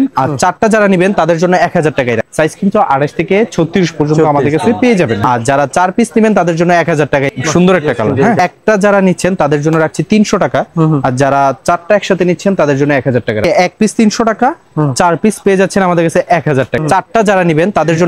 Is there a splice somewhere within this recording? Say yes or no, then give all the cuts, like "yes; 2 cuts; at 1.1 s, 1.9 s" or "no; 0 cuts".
yes; 6 cuts; at 2.2 s, 5.2 s, 7.3 s, 8.4 s, 13.4 s, 16.8 s